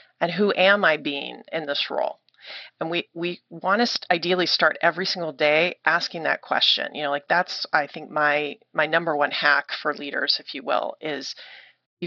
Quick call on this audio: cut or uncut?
uncut